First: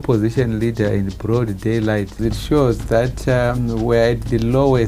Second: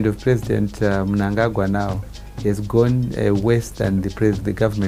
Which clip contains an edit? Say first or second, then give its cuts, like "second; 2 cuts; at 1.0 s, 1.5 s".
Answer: first; 1 cut; at 2.2 s